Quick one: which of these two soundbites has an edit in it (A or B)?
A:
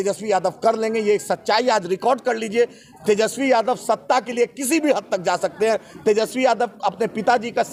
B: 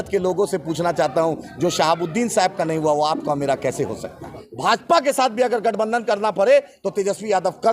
B